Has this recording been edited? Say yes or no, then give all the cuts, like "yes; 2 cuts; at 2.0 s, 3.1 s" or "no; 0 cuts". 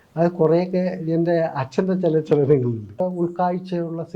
yes; 1 cut; at 3.0 s